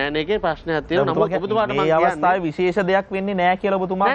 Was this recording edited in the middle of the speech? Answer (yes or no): no